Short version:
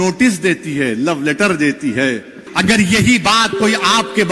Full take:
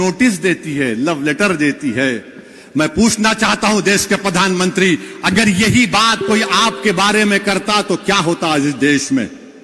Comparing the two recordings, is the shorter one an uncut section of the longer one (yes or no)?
no